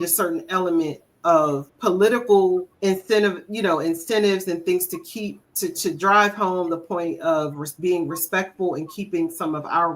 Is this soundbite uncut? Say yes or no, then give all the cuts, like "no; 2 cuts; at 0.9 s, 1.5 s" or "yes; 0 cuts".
no; 3 cuts; at 1.7 s, 2.7 s, 5.4 s